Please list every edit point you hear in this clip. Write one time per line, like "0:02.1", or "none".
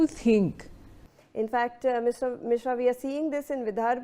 0:01.2

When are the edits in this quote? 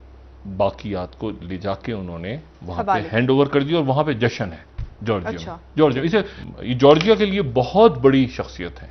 0:06.4

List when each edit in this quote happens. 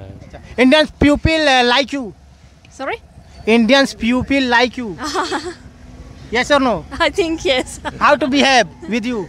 none

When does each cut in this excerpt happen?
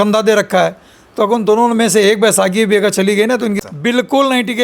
0:03.6

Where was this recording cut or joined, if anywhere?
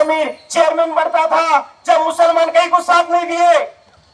none

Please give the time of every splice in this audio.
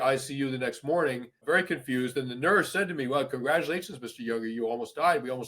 0:01.4

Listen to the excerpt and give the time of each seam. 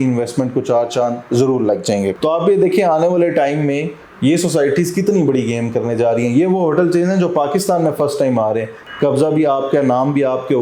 0:02.1
0:08.8

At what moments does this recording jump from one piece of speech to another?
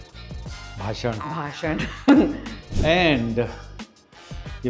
none

